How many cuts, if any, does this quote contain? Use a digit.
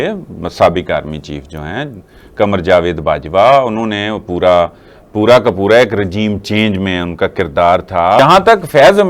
1